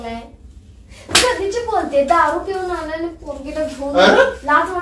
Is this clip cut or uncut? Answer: uncut